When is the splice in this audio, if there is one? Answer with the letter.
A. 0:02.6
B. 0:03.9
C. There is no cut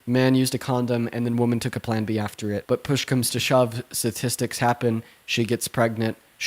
A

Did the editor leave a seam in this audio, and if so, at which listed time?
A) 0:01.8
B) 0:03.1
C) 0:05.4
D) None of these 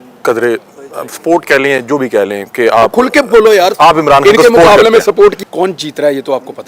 C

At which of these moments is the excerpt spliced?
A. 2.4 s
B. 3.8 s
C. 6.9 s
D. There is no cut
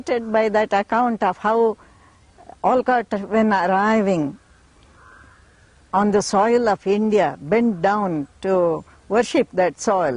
D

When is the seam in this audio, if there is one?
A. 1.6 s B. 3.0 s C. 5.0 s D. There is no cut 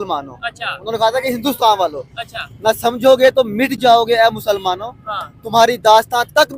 D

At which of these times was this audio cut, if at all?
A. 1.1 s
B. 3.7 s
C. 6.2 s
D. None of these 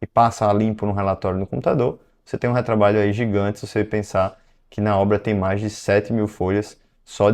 D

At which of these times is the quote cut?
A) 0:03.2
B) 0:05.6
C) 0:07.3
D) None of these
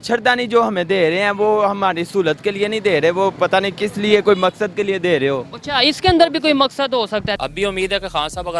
C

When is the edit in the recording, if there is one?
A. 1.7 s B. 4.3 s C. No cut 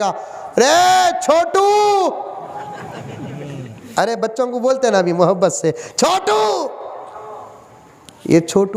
C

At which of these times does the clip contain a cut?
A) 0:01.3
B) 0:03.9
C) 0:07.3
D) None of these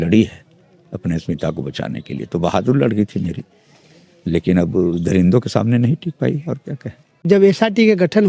C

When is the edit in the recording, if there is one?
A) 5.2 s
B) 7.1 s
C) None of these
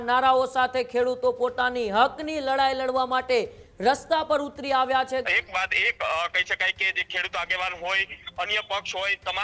A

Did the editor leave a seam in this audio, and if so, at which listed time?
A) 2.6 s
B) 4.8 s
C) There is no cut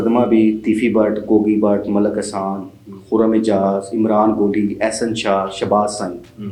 C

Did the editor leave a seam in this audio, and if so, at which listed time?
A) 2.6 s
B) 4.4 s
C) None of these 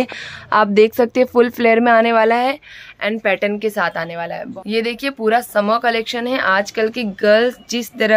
B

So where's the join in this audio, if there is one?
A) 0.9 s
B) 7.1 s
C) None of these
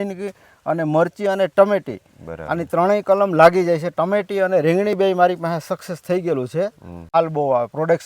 B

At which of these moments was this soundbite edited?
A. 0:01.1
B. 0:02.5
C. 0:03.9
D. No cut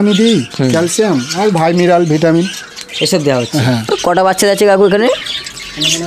C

